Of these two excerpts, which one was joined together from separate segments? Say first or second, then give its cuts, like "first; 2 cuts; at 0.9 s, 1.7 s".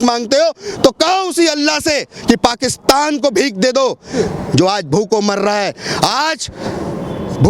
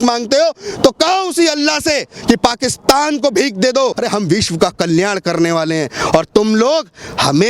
second; 1 cut; at 4.0 s